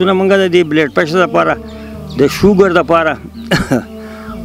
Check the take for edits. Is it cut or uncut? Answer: uncut